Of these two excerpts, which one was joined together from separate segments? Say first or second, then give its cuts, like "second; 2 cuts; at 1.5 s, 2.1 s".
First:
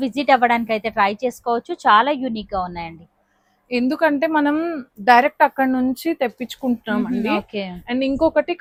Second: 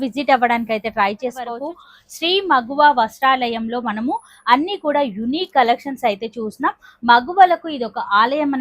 second; 1 cut; at 1.6 s